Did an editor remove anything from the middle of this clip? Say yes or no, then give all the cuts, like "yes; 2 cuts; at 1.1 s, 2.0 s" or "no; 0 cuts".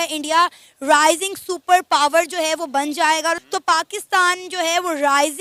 no; 0 cuts